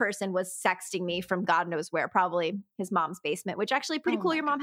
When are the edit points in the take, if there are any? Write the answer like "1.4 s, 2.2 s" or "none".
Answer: none